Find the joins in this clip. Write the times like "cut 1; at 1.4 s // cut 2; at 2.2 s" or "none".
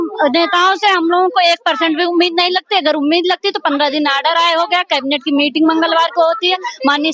none